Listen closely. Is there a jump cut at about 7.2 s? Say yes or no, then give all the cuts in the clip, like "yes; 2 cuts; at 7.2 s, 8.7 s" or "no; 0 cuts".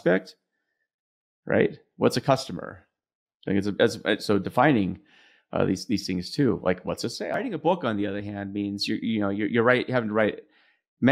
yes; 1 cut; at 7.2 s